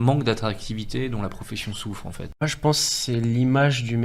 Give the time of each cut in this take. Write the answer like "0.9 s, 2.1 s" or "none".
2.4 s